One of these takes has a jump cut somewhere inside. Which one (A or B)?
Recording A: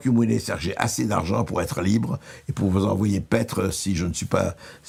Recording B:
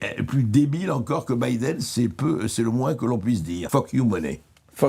B